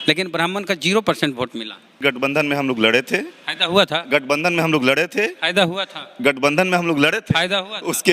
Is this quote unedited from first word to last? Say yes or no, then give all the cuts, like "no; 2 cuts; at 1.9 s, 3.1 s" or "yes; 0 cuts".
no; 1 cut; at 1.9 s